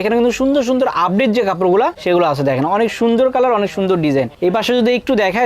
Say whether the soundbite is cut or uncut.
uncut